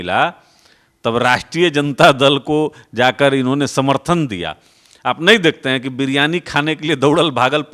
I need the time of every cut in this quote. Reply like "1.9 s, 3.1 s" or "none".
none